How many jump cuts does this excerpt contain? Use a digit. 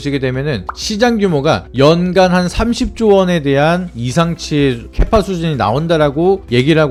0